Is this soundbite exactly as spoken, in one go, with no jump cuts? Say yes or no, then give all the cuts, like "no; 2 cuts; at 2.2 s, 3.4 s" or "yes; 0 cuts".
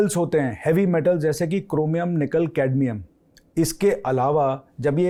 yes; 0 cuts